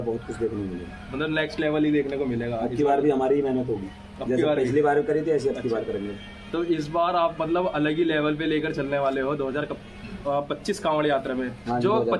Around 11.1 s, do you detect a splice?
no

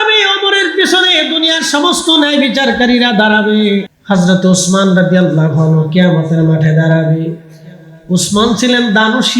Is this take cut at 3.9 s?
yes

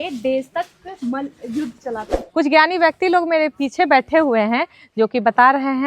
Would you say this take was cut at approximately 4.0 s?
no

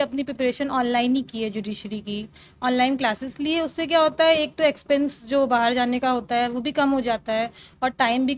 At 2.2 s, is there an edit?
no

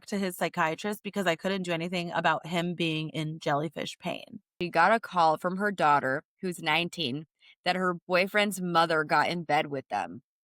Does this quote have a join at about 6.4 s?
no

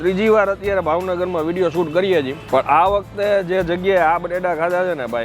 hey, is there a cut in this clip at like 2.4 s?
yes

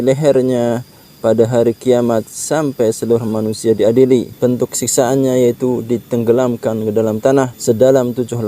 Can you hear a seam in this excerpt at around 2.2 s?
no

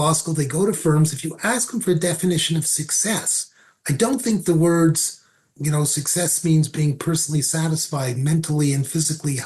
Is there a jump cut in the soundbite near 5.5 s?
yes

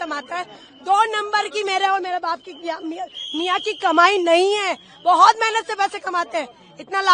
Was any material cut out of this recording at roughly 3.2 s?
no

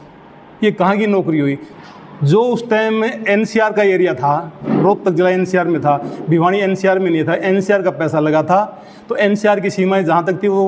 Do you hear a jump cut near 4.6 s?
no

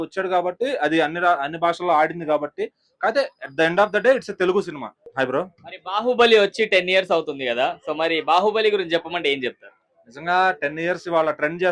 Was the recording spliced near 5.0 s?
yes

